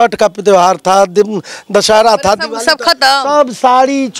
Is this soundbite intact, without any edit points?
yes; 0 cuts

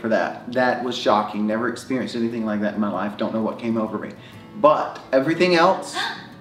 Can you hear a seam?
no; 0 cuts

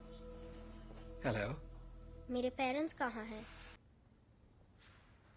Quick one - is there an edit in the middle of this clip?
yes; 1 cut; at 3.8 s

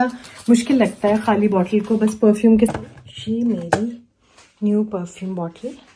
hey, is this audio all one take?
no; 1 cut; at 2.7 s

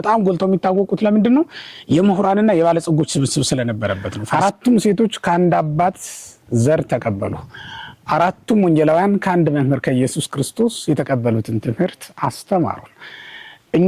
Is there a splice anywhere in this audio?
yes; 1 cut; at 4.1 s

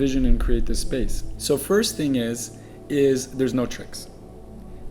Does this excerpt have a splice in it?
yes; 1 cut; at 1.3 s

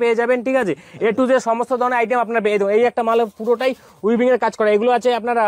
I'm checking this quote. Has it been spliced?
no; 0 cuts

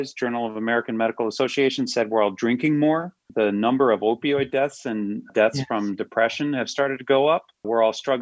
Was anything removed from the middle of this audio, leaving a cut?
no; 0 cuts

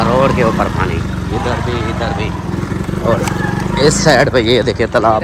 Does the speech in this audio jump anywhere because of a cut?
no; 0 cuts

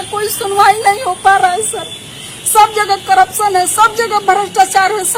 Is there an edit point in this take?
no; 0 cuts

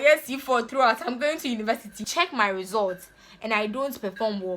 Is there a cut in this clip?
yes; 1 cut; at 2.0 s

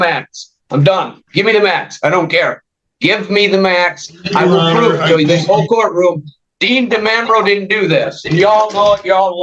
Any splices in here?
no; 0 cuts

